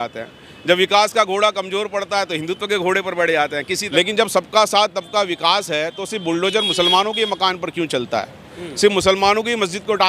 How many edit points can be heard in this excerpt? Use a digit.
1